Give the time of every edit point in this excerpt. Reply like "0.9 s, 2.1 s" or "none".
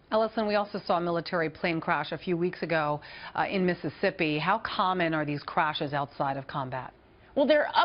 none